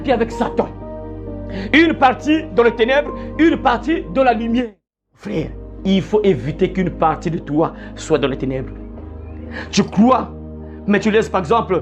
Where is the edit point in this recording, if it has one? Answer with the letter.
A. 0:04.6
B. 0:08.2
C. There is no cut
A